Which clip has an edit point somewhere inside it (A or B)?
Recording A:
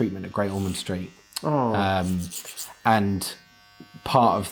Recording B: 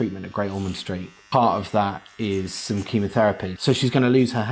B